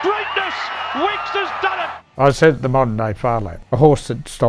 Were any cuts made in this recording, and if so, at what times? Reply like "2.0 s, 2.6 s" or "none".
2.0 s, 3.5 s